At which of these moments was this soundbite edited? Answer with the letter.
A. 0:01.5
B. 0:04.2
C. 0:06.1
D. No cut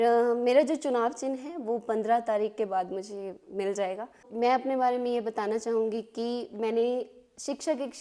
B